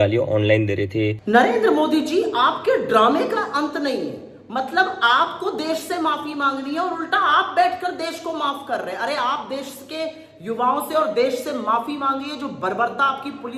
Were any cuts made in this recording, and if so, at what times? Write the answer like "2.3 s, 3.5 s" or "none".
1.2 s

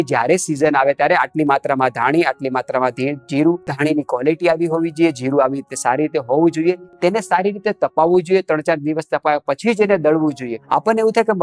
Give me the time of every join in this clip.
3.7 s, 6.9 s, 10.5 s

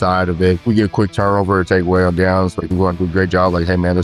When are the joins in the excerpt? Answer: 1.1 s, 2.6 s

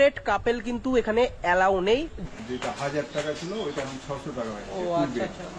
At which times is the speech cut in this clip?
2.2 s

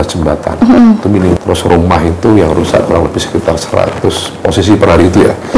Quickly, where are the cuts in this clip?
1.4 s

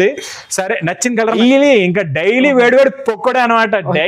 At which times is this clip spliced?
1.4 s

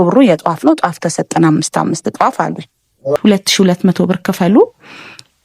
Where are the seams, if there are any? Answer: 3.2 s

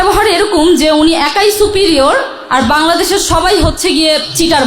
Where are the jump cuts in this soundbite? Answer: none

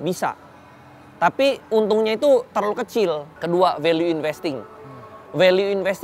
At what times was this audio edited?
3.3 s

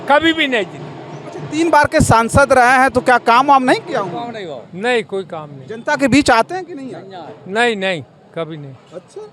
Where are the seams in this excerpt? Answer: none

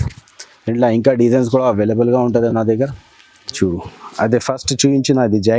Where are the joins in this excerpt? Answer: 3.5 s

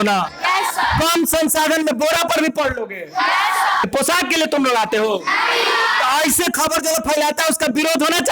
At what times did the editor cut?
3.9 s

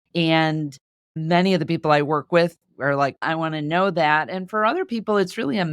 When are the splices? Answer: 3.3 s

